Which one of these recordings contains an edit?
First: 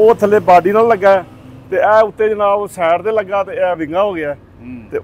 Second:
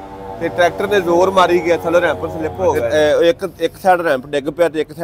second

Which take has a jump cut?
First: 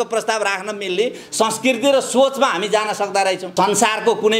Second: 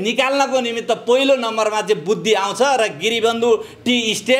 first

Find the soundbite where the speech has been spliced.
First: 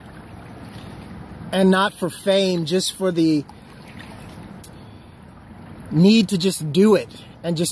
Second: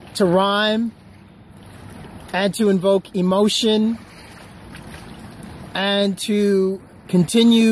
second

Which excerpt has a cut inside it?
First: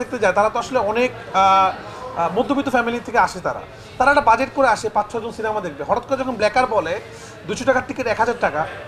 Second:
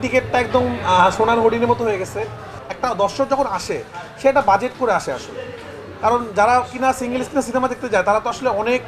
second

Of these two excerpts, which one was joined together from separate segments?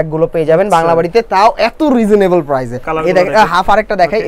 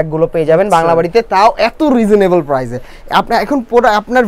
first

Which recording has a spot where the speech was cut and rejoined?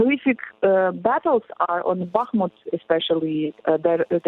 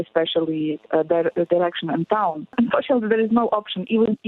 second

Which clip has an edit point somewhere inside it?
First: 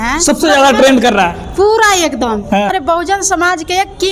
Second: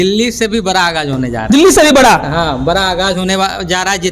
first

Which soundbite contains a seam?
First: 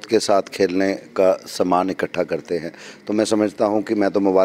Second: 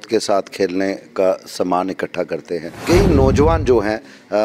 second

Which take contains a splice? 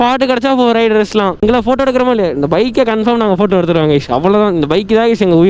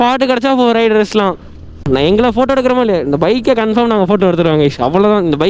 first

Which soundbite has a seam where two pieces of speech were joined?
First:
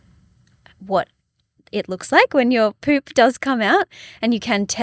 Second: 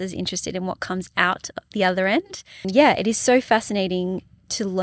second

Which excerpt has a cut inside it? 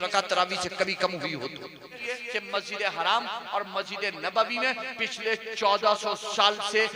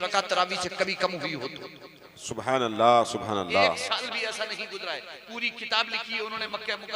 first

